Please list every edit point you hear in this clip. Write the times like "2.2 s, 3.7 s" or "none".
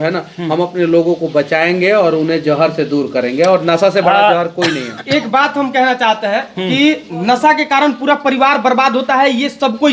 none